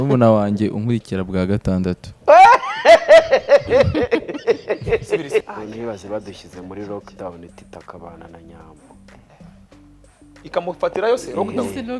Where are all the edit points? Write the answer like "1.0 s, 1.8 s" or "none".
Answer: 5.4 s